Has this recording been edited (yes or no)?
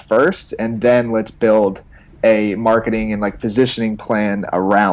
no